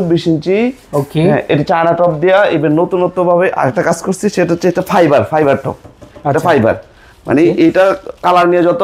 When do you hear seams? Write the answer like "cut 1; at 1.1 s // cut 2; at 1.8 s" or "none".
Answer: none